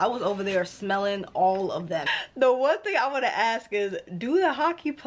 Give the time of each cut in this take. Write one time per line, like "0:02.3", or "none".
0:02.1